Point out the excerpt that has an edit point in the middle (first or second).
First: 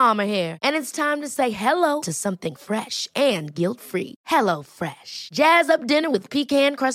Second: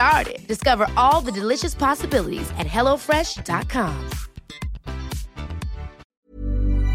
second